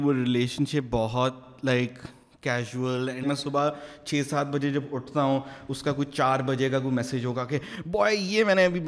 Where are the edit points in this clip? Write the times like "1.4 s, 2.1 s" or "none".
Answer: 3.2 s